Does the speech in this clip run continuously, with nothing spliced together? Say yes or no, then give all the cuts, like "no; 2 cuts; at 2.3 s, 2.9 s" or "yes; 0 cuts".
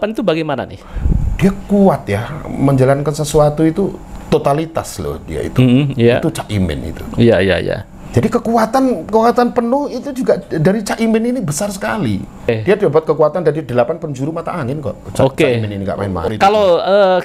no; 2 cuts; at 12.5 s, 16.2 s